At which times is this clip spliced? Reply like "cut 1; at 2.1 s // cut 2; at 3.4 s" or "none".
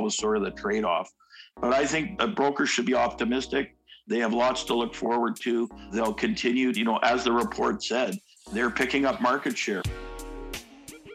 cut 1; at 9.8 s